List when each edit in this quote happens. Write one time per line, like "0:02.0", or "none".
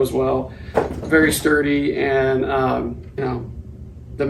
0:03.0